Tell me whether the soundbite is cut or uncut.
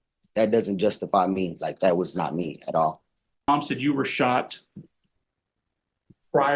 cut